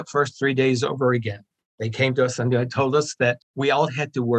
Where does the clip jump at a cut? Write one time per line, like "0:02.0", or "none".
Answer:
0:01.5
0:03.5

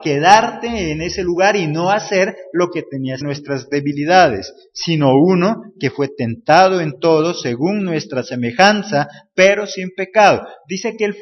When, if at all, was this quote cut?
none

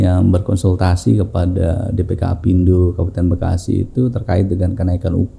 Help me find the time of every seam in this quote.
none

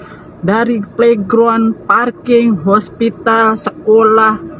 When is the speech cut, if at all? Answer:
none

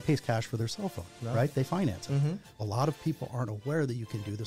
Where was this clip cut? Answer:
0:02.7

